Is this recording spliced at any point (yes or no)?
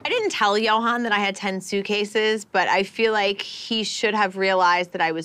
no